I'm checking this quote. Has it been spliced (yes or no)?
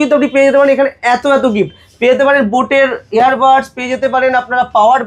no